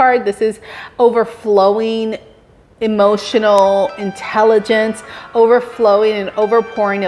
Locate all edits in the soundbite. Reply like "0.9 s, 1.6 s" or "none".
none